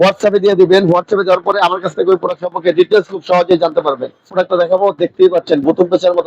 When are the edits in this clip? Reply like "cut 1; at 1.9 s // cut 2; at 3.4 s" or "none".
cut 1; at 4.3 s